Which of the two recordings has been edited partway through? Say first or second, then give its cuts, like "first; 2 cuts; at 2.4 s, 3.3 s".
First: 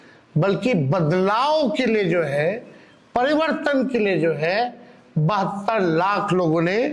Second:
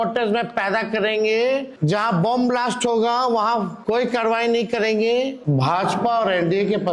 second; 3 cuts; at 1.7 s, 3.7 s, 5.4 s